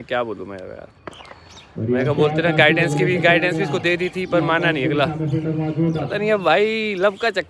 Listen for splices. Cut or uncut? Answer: uncut